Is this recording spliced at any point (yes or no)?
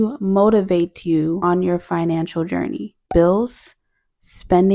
yes